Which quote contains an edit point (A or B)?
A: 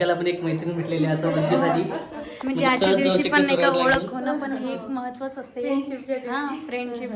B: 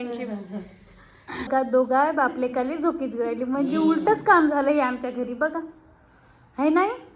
B